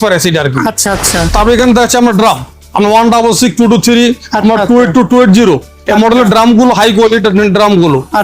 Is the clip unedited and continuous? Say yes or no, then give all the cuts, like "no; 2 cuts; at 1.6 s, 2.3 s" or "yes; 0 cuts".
no; 1 cut; at 1.2 s